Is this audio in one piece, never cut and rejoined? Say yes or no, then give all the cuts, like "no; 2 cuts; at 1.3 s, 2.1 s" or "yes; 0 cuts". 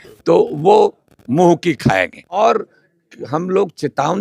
no; 1 cut; at 2.4 s